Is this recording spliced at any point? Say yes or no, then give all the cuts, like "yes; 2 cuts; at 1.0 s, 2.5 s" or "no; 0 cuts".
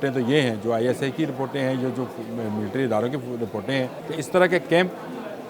yes; 1 cut; at 4.0 s